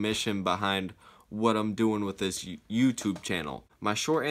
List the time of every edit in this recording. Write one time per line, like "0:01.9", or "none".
0:03.3